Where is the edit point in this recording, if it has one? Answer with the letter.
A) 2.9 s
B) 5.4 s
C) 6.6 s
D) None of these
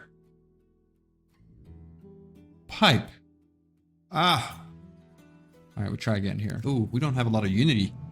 C